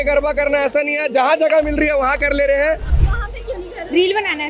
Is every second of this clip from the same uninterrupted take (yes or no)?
no